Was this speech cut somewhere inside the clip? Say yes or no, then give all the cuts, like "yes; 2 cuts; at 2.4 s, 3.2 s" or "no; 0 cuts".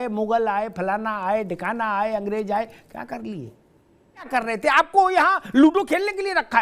yes; 1 cut; at 4.3 s